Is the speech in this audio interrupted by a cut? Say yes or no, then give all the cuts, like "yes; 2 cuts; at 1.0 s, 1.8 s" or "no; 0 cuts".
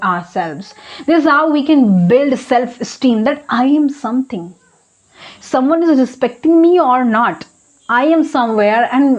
no; 0 cuts